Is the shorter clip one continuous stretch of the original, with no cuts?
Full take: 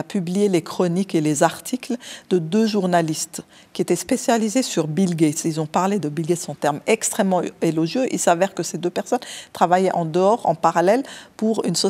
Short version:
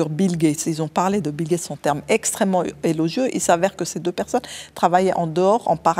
yes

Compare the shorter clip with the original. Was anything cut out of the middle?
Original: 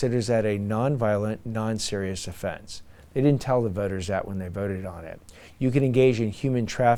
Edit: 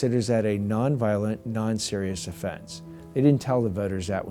no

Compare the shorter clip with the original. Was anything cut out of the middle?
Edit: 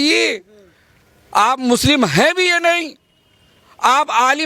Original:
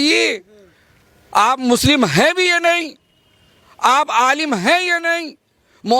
no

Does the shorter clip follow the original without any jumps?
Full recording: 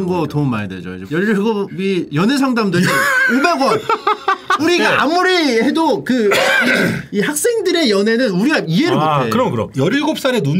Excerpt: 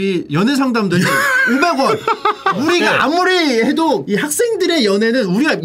no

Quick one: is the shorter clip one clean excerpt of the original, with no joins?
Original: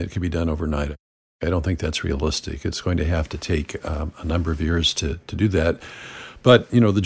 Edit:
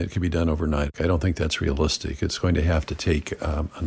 no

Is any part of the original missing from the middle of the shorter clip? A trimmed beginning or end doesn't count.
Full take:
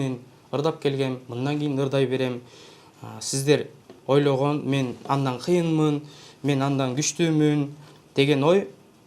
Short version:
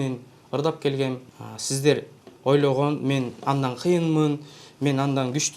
yes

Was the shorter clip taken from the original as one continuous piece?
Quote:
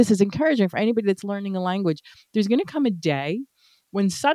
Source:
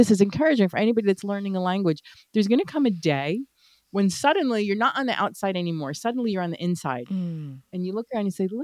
yes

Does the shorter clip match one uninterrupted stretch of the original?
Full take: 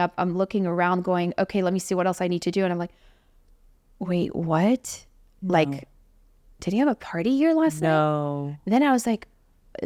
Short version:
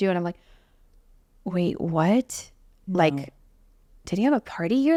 yes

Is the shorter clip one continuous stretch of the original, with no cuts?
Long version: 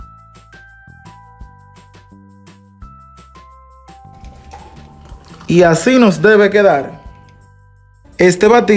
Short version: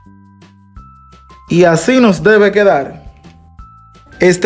no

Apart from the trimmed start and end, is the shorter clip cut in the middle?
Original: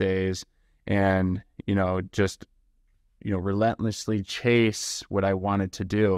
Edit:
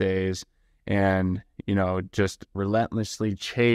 yes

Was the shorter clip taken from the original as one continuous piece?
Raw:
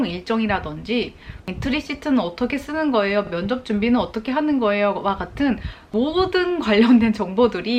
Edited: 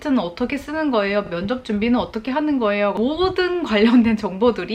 no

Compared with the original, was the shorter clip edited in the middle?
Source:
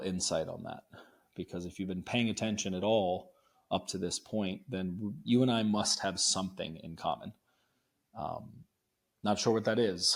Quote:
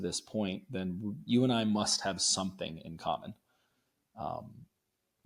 no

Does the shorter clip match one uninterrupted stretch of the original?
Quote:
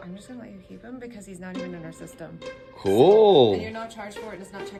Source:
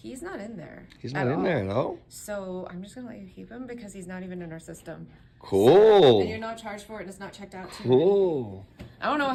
yes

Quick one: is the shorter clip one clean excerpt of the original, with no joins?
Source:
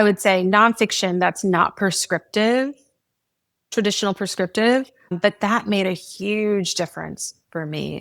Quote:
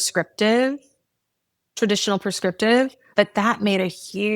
no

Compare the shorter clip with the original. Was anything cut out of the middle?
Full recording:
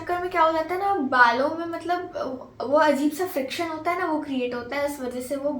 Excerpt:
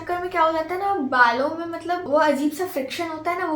yes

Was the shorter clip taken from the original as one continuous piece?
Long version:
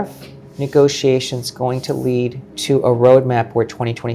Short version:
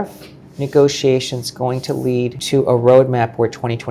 no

